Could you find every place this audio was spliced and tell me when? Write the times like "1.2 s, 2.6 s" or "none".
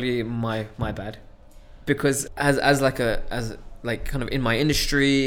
2.2 s

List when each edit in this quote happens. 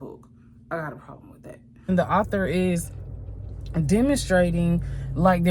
1.9 s

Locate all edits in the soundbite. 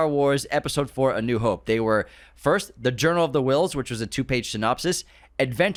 none

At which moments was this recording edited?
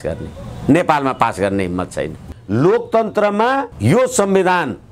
2.3 s

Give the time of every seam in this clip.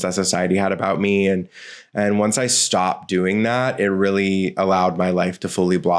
none

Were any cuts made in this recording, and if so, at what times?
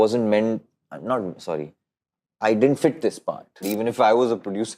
3.7 s

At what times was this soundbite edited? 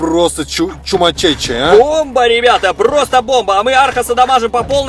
none

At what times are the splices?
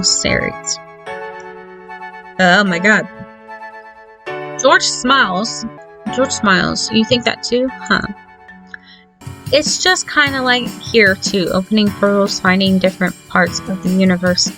5.8 s, 9.3 s

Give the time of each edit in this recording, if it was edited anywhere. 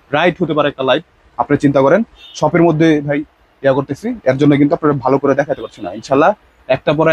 none

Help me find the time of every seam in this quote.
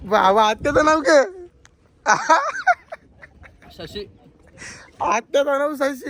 none

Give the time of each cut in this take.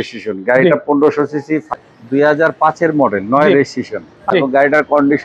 1.7 s, 4.2 s

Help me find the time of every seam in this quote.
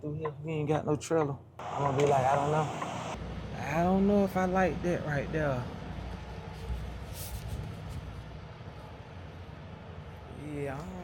1.5 s, 3.1 s

